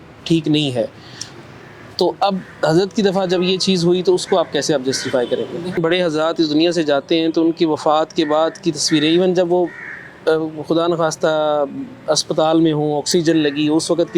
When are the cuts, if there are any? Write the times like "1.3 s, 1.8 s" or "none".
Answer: 5.8 s